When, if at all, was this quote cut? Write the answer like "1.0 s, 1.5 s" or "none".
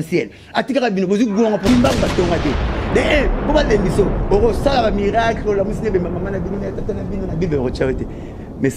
1.7 s